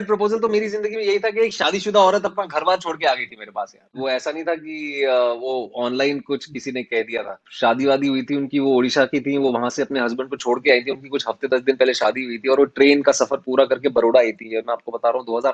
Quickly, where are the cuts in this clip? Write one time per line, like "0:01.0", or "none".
none